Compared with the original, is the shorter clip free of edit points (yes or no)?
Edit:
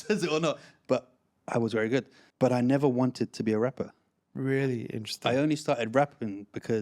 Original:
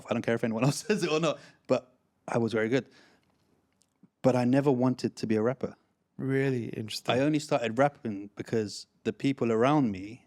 no